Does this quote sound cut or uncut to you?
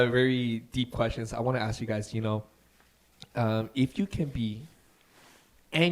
uncut